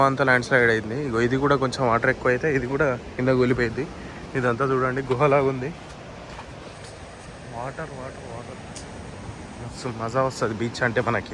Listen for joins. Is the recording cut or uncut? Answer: uncut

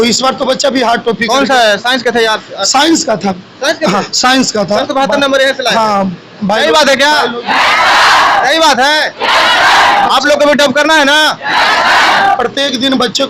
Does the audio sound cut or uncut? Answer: cut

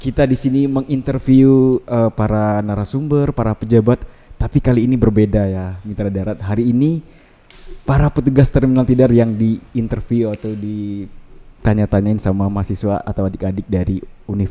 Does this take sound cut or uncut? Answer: uncut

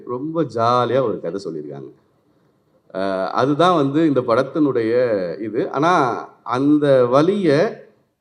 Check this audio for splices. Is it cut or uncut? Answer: uncut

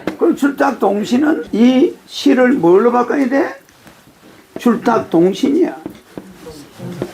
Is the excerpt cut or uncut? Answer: cut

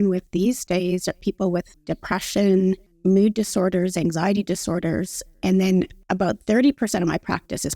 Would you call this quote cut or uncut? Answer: cut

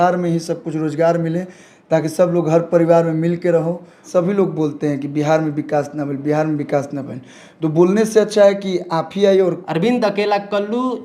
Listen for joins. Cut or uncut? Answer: cut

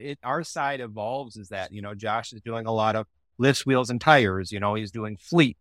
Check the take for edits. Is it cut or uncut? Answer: uncut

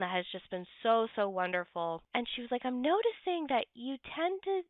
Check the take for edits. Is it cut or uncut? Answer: cut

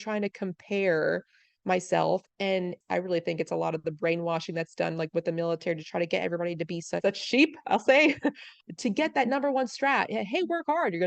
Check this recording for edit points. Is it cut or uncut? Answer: cut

